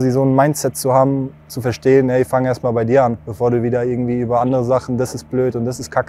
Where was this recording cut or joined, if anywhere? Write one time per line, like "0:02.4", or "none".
0:03.2